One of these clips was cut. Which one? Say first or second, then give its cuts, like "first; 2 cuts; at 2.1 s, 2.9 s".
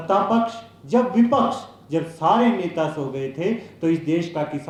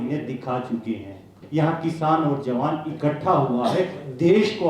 second; 1 cut; at 1.4 s